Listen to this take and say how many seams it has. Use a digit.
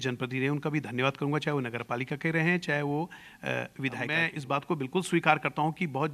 1